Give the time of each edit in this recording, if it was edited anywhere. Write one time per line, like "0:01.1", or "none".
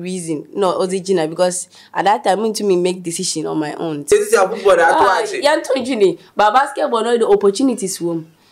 0:04.1